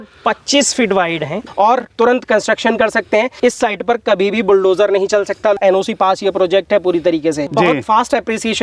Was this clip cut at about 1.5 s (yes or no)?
yes